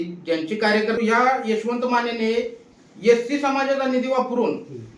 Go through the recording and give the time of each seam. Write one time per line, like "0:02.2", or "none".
0:01.0